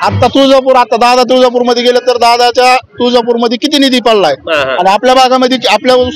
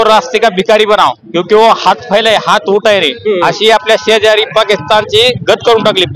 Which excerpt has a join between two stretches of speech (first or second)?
second